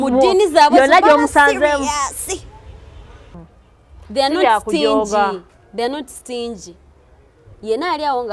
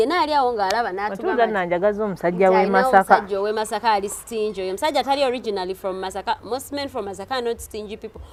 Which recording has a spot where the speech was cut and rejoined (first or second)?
first